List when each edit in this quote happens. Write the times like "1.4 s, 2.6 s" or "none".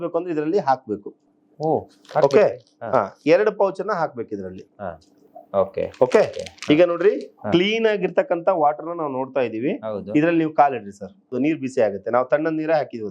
11.3 s